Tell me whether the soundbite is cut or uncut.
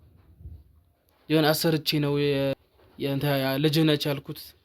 cut